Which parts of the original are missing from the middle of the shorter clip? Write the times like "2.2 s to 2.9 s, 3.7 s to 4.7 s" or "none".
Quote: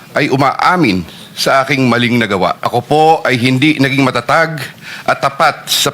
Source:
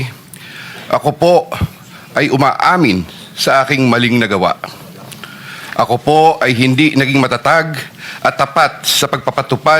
4.7 s to 5.9 s